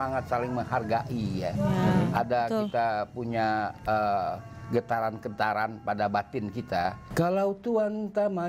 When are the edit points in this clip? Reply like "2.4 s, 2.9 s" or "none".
7.0 s